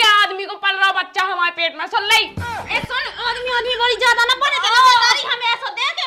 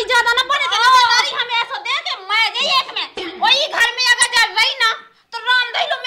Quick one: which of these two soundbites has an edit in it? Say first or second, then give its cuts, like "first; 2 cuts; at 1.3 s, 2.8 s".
second; 1 cut; at 3.2 s